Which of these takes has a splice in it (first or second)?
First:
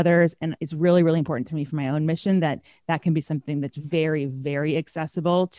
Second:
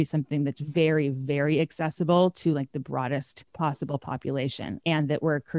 second